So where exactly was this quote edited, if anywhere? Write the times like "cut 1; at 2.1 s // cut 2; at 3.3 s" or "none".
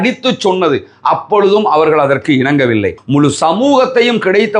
cut 1; at 3.0 s